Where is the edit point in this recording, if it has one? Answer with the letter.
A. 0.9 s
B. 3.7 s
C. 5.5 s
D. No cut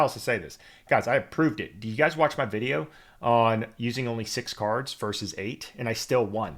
D